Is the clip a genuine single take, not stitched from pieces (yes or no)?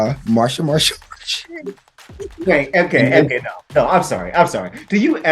no